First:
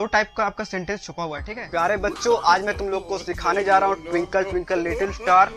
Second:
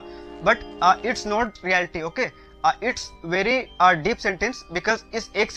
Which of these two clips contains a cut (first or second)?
first